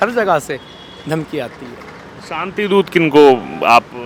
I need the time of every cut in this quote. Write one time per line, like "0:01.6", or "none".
none